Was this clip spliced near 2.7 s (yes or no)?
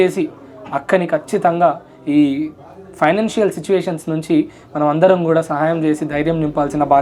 no